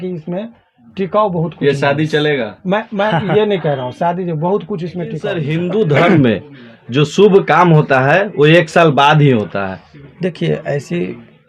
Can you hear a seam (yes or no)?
yes